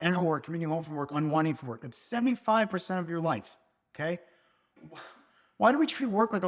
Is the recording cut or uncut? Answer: uncut